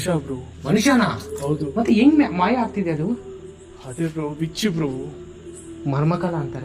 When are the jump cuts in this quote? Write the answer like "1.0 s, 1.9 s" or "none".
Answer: none